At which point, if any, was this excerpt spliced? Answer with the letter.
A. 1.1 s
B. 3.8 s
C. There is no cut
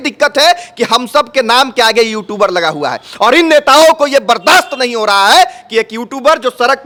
C